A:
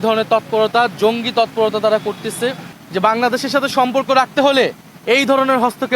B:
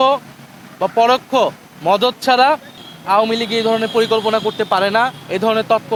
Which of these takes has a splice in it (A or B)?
A